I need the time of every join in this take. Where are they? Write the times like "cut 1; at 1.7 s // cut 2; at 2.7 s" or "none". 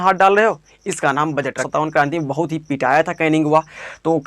cut 1; at 1.6 s